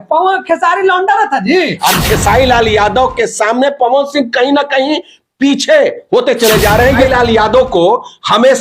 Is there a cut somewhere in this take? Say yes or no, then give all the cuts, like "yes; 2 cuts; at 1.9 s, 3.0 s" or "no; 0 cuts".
yes; 2 cuts; at 2.1 s, 7.0 s